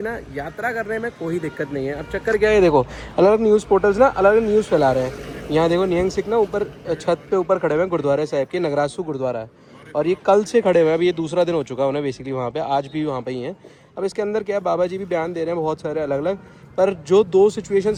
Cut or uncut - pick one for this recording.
uncut